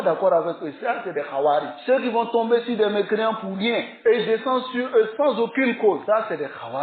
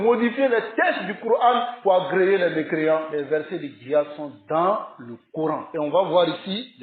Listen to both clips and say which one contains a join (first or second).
second